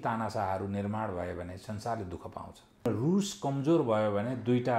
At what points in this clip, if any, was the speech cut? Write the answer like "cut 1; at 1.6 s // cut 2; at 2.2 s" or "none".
cut 1; at 2.9 s